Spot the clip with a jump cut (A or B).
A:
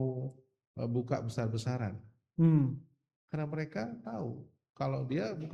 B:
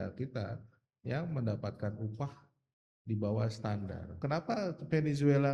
B